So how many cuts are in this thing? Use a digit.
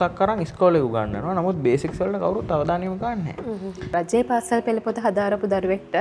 1